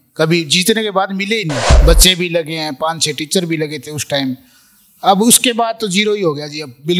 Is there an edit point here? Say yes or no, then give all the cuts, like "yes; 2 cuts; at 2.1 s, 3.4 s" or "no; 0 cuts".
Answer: yes; 1 cut; at 1.7 s